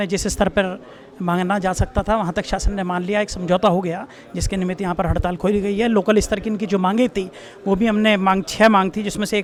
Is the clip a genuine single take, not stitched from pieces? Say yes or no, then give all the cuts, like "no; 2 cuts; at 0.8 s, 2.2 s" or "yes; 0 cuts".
yes; 0 cuts